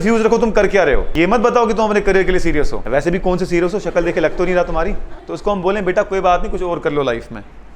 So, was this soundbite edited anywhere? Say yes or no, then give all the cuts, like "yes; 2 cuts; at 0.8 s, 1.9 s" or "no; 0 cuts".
yes; 3 cuts; at 1.1 s, 2.8 s, 5.1 s